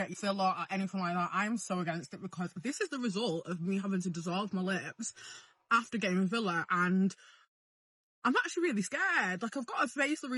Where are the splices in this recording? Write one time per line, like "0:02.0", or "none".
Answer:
none